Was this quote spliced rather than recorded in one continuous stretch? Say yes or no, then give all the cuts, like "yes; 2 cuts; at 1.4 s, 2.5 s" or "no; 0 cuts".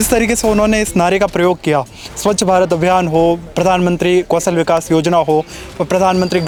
no; 0 cuts